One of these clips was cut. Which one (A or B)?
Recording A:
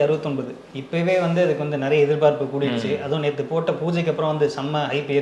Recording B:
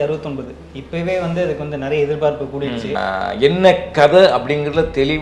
B